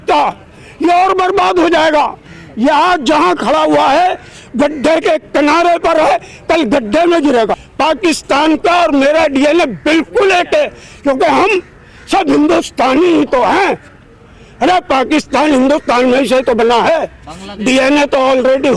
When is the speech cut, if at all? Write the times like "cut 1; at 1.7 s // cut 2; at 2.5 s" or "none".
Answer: cut 1; at 7.6 s